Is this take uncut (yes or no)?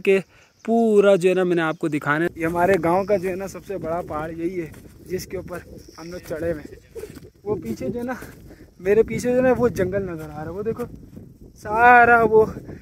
no